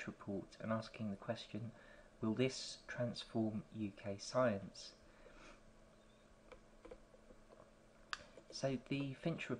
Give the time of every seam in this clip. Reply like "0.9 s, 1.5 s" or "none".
5.4 s